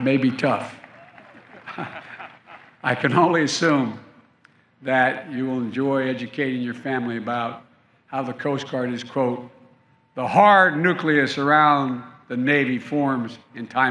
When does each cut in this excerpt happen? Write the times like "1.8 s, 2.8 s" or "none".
none